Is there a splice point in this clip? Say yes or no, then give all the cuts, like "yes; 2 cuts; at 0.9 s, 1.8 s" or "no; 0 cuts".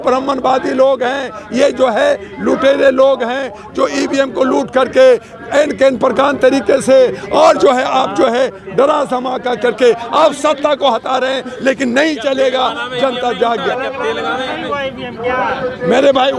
no; 0 cuts